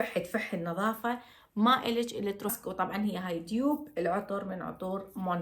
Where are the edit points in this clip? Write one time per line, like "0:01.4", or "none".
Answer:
0:02.6